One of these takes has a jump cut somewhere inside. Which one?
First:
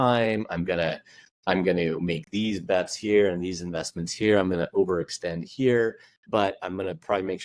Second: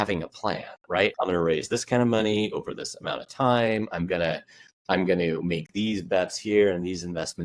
second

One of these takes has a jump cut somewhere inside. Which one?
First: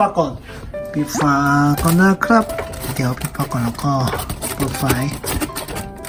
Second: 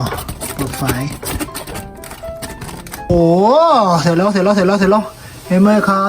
second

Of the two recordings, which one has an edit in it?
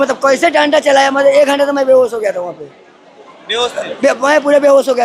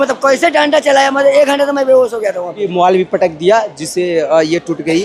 second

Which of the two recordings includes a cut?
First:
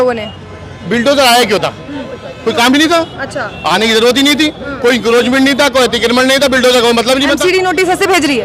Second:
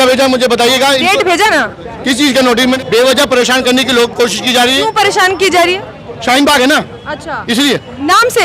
second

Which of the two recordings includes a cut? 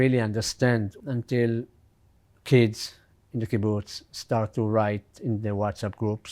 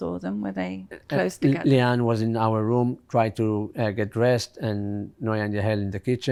first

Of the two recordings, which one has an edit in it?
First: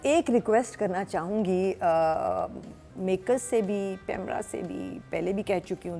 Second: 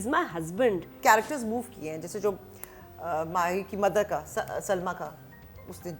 second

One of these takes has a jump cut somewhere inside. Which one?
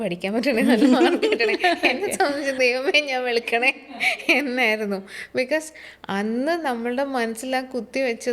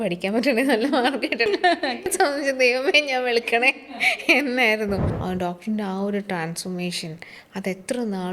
second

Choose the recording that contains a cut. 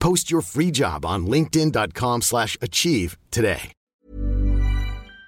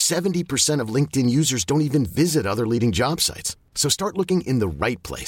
first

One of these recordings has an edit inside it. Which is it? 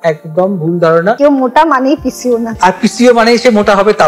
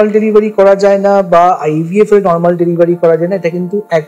first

